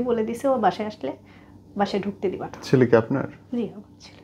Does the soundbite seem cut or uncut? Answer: uncut